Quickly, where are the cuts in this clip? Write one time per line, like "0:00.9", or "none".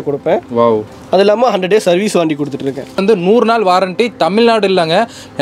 0:03.0